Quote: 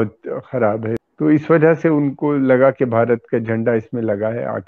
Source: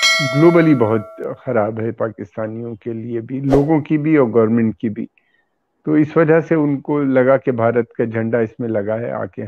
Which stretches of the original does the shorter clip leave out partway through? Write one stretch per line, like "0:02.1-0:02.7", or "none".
0:01.9-0:05.6